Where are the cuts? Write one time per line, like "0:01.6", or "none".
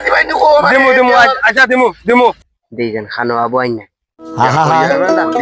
0:02.4